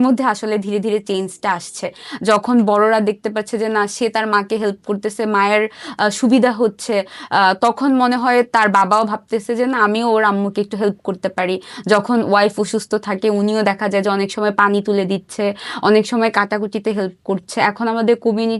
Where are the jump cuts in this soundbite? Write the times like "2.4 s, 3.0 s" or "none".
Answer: none

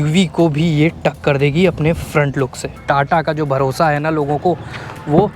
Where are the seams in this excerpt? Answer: 2.6 s

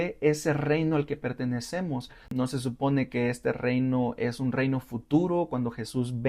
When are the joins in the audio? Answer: 2.3 s

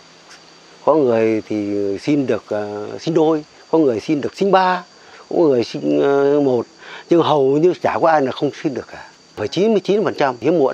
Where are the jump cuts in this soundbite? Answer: 9.5 s

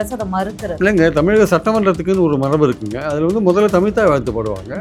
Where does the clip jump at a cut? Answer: none

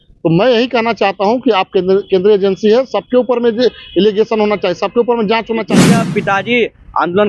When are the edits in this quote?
5.8 s

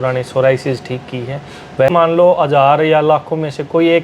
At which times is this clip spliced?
1.9 s

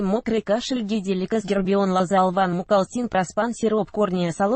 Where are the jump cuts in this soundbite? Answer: 3.2 s

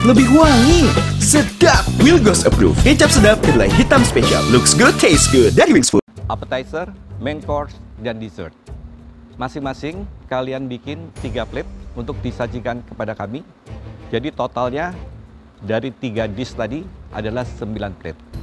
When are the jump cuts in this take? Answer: 6.2 s

